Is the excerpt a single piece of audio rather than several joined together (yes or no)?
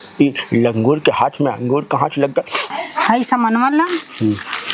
no